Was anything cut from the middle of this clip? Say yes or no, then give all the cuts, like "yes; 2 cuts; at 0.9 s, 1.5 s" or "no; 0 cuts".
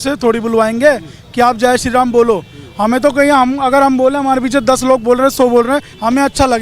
no; 0 cuts